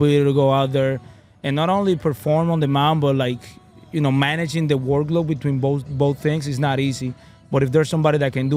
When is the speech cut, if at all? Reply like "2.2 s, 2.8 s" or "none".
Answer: none